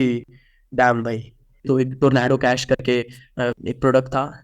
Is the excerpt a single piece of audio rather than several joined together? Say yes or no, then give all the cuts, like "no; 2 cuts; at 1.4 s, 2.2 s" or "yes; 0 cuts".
no; 2 cuts; at 1.6 s, 3.5 s